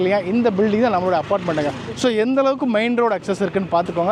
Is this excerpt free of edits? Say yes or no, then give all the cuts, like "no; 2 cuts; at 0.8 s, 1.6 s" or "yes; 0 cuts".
yes; 0 cuts